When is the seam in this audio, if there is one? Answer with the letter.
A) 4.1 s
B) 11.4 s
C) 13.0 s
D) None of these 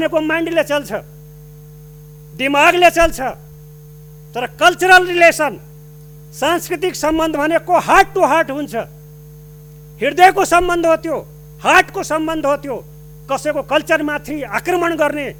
D